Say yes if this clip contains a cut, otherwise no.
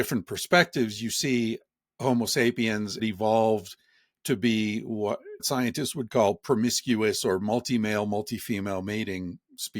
yes